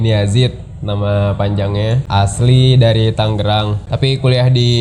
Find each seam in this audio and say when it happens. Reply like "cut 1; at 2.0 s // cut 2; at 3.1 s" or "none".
cut 1; at 2.0 s // cut 2; at 3.8 s

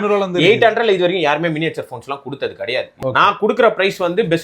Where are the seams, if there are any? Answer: cut 1; at 3.0 s

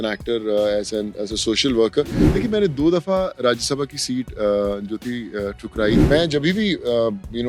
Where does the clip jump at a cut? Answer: cut 1; at 2.2 s // cut 2; at 6.0 s

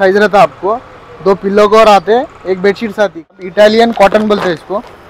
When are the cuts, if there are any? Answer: cut 1; at 3.4 s

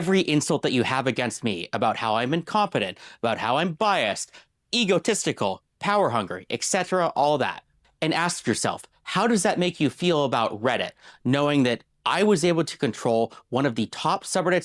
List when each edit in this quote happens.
none

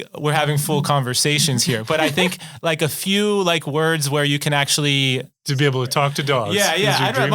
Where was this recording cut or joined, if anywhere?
cut 1; at 5.4 s

